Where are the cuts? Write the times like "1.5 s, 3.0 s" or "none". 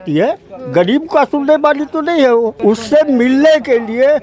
2.6 s